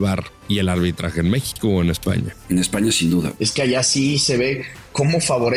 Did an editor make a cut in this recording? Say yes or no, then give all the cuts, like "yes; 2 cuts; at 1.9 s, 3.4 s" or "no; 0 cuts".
yes; 2 cuts; at 2.3 s, 3.4 s